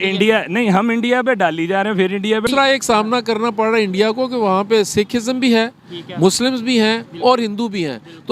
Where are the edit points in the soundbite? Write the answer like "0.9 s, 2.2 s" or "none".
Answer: 2.5 s